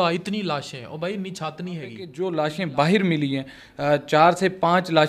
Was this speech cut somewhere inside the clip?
yes; 1 cut; at 2.1 s

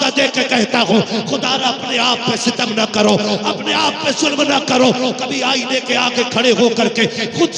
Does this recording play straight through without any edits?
yes; 0 cuts

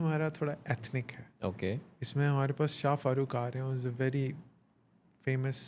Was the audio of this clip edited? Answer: no; 0 cuts

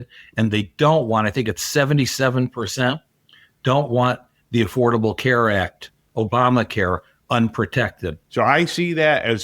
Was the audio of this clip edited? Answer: yes; 1 cut; at 8.2 s

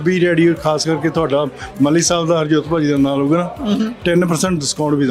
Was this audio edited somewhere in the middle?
no; 0 cuts

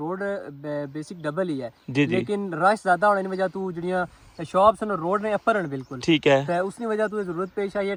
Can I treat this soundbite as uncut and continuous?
yes; 0 cuts

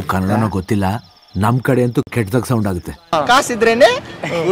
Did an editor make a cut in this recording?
yes; 1 cut; at 3.1 s

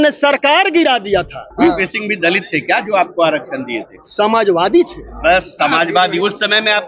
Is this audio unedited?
no; 1 cut; at 1.4 s

